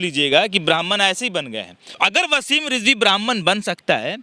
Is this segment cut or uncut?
cut